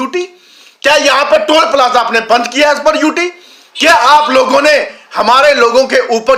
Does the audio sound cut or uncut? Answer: uncut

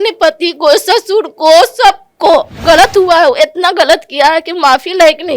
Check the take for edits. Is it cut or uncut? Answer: cut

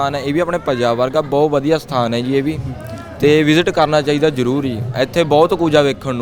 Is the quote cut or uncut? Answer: uncut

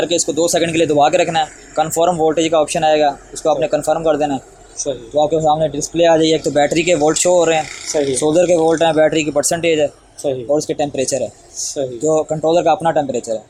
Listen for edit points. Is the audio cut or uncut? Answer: uncut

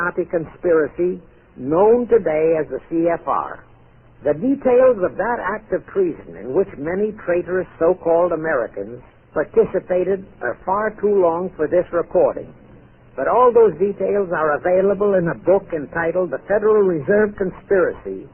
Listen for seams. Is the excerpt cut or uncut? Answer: cut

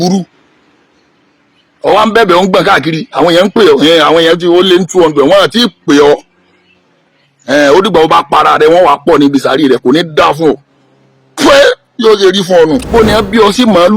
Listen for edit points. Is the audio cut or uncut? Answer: cut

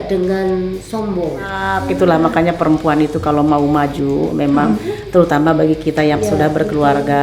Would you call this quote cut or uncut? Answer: cut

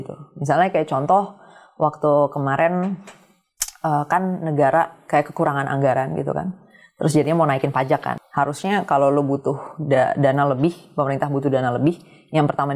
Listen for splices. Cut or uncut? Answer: cut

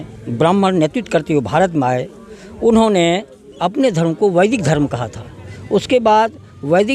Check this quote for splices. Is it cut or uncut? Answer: uncut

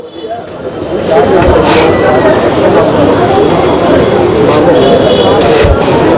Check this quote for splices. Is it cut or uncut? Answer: uncut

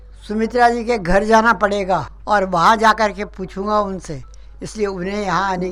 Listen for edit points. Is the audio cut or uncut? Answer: uncut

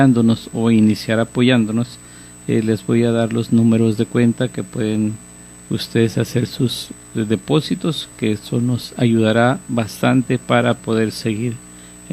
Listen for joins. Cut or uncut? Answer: cut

